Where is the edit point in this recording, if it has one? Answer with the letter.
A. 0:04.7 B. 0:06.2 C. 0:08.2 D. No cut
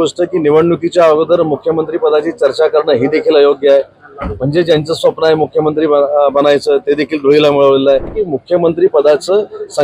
C